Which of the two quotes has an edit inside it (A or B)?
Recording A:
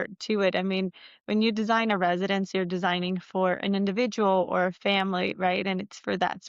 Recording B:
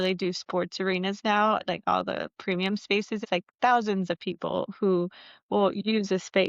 B